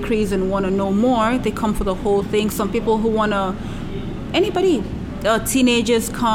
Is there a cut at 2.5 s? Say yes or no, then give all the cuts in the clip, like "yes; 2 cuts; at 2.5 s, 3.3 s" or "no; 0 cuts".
no; 0 cuts